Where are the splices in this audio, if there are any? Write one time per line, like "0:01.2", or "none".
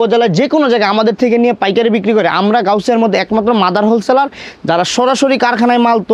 none